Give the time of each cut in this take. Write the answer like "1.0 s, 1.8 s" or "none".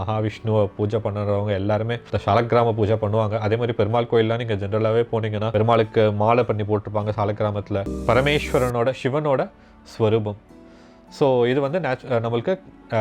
2.0 s, 5.5 s, 7.9 s